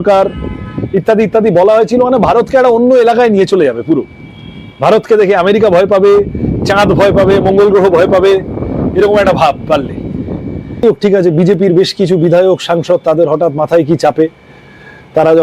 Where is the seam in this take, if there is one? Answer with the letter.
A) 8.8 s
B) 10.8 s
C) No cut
B